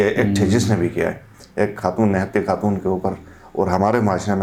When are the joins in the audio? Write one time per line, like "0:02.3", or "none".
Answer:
none